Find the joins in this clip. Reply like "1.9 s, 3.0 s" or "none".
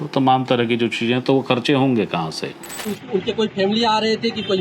2.9 s